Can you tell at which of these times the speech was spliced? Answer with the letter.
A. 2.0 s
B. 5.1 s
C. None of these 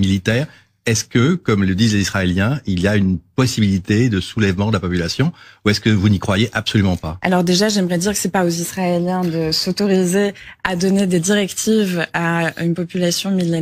C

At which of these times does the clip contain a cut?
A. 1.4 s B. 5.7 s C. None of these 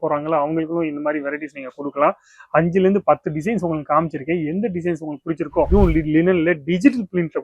B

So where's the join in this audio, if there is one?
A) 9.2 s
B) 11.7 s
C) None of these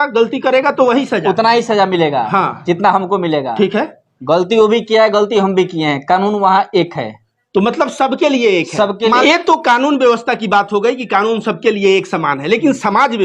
A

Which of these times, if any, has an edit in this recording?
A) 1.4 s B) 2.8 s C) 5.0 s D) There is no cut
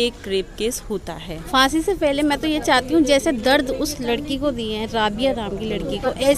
A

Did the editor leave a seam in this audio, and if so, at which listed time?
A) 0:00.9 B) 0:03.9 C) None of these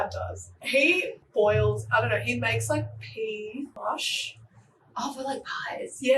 A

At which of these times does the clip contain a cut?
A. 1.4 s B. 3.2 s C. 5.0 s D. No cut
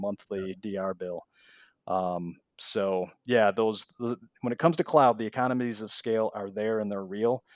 D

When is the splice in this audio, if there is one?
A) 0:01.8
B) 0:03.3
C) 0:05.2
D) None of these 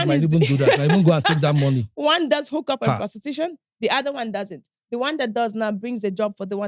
D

